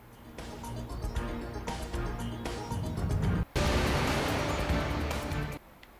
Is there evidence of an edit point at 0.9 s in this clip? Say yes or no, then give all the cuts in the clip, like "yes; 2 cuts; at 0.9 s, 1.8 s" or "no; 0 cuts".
no; 1 cut; at 3.6 s